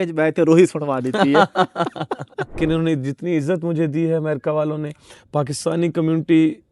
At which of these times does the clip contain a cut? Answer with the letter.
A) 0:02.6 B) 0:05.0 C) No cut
A